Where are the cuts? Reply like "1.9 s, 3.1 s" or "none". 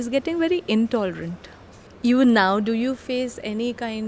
1.7 s